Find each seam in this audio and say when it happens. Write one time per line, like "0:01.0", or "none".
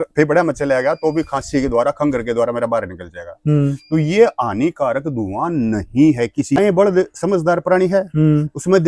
0:06.6